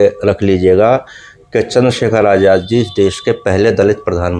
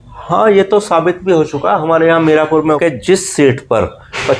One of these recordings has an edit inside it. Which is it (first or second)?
second